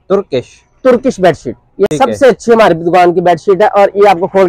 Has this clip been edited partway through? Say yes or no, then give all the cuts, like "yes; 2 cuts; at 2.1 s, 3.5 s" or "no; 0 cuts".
no; 0 cuts